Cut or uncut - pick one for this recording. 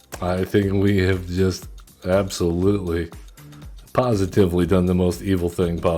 uncut